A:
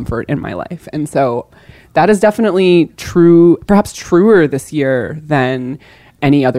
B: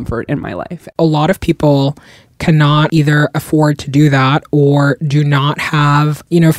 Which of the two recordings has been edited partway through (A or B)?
B